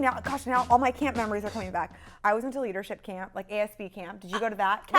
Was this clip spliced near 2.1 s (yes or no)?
yes